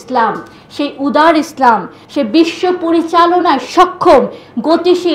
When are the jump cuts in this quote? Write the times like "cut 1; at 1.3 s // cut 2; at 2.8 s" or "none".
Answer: cut 1; at 2.0 s